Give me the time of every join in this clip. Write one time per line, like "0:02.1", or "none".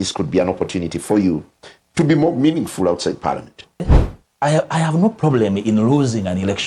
0:03.9